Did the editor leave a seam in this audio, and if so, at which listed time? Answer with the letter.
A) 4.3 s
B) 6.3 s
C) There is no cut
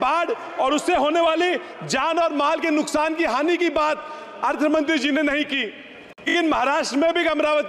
B